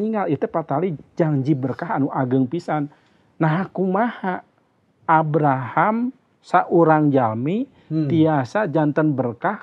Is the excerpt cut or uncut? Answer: uncut